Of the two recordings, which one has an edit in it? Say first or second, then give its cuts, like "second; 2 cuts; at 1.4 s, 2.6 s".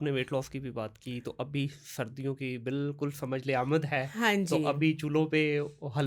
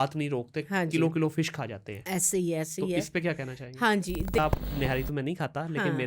second; 1 cut; at 4.4 s